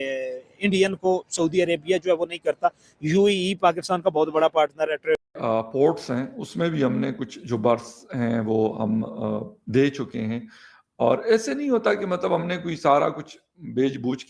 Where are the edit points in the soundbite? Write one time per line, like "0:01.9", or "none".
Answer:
0:05.2